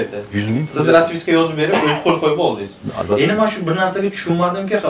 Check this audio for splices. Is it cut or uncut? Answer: uncut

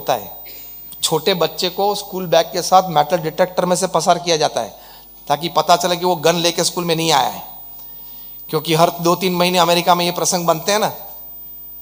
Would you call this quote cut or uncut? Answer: uncut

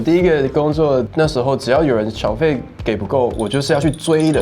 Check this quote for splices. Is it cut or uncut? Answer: cut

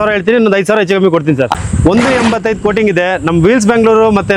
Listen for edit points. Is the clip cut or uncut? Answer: cut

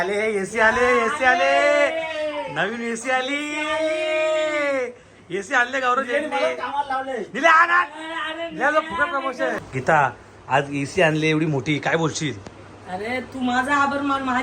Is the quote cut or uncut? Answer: cut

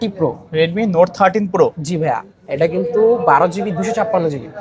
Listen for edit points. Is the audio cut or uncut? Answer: uncut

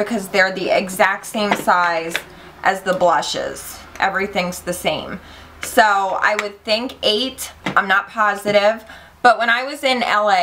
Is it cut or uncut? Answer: cut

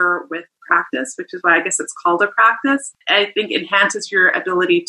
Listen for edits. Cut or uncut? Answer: cut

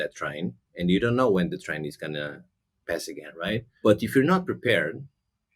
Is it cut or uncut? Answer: cut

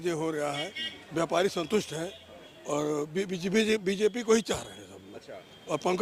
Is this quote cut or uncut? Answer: uncut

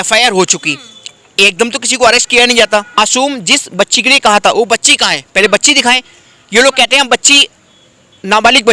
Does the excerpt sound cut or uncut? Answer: cut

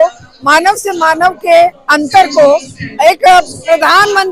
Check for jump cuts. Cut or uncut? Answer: uncut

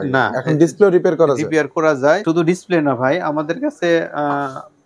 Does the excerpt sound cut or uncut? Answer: cut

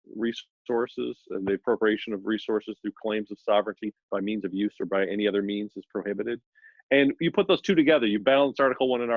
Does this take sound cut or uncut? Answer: uncut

